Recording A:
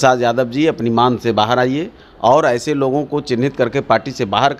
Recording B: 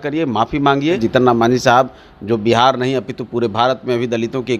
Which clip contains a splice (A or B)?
B